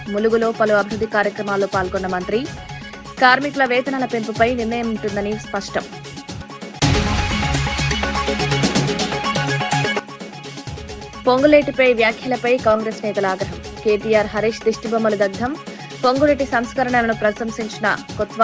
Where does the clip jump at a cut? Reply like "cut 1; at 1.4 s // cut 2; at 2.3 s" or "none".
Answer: none